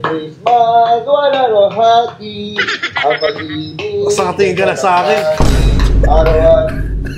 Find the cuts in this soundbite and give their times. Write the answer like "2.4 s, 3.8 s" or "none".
none